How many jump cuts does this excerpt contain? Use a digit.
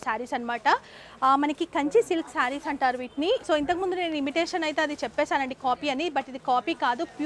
0